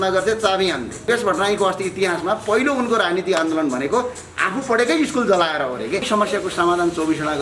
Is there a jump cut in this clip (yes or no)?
yes